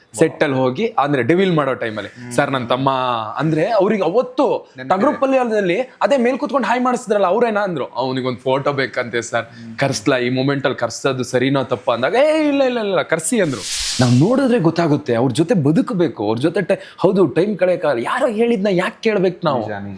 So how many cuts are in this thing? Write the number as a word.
one